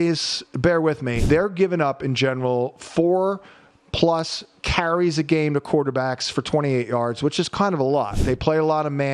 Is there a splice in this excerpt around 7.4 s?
no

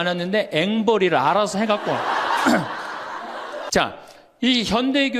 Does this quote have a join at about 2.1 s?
no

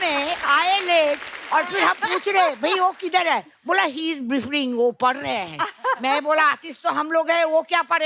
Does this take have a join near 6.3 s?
no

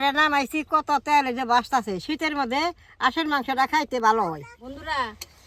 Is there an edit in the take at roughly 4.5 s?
yes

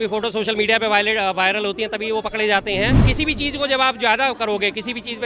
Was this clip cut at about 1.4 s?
no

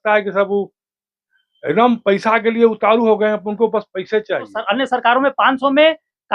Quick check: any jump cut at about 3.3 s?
no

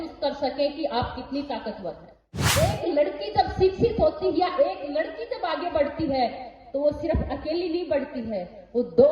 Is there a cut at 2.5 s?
yes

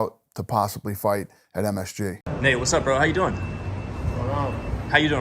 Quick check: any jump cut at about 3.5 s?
no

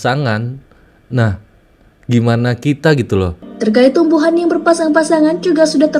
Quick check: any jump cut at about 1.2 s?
no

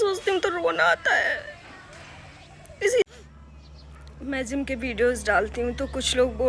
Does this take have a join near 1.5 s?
no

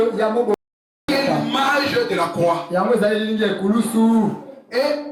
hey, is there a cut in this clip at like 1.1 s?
no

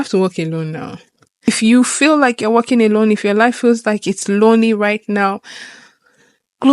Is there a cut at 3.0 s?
no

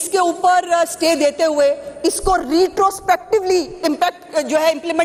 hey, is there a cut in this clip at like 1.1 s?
no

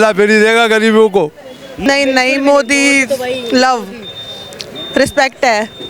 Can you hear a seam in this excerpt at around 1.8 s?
yes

